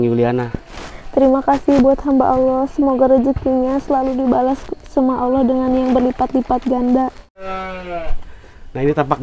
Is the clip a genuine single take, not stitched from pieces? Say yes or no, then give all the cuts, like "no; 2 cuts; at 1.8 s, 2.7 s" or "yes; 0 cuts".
no; 1 cut; at 7.5 s